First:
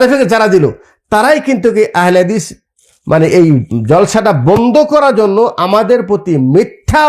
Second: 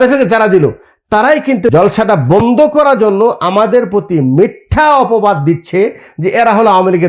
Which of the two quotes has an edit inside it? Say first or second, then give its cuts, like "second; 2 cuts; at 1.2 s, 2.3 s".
second; 1 cut; at 1.7 s